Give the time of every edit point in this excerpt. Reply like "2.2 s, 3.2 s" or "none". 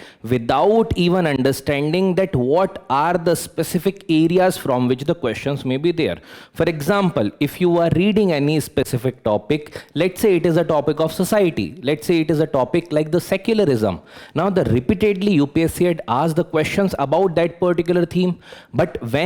none